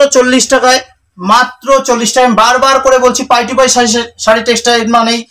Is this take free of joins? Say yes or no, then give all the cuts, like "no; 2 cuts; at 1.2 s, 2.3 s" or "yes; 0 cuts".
yes; 0 cuts